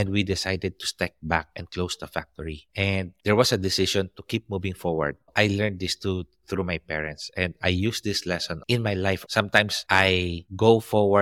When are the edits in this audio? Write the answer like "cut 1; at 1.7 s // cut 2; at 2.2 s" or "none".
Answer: cut 1; at 5.3 s // cut 2; at 8.6 s